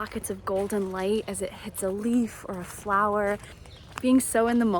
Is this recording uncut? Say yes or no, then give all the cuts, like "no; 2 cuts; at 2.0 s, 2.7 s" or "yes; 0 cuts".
no; 1 cut; at 3.6 s